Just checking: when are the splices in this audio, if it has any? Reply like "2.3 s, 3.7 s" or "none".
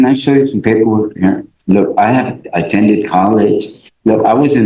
none